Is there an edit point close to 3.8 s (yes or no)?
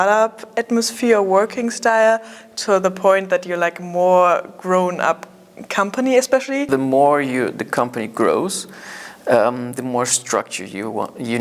no